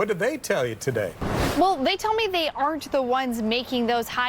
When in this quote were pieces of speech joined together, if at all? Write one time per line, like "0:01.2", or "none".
0:01.2